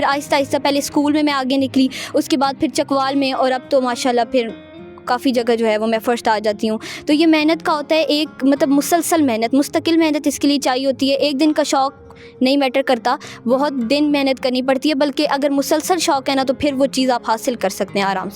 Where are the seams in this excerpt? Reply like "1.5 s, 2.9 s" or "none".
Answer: none